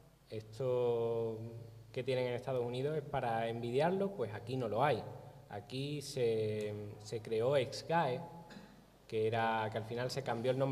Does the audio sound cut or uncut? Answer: uncut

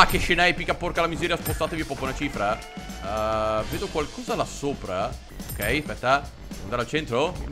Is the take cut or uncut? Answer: uncut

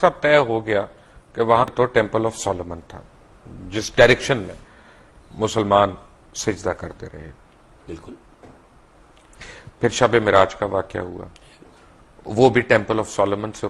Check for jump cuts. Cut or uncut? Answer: cut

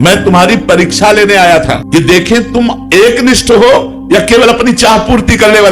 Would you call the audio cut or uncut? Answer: cut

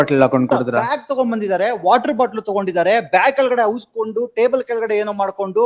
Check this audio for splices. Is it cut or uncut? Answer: uncut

